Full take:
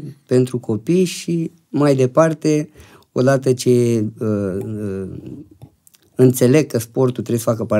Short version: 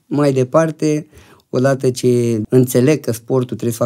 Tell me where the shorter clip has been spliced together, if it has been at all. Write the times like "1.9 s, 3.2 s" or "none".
2.4 s